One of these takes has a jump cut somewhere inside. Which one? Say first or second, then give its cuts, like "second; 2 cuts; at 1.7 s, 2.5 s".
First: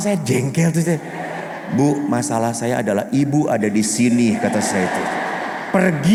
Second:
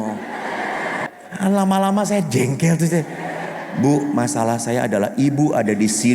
second; 1 cut; at 1.1 s